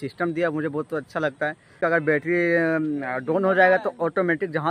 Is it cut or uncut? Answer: cut